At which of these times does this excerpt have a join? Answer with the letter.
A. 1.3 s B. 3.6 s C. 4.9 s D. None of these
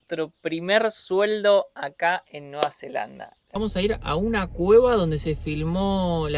B